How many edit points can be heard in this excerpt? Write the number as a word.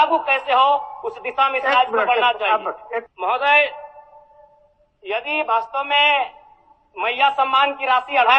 one